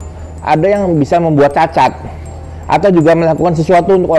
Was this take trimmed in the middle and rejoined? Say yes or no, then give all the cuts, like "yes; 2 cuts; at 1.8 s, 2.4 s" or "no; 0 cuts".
no; 0 cuts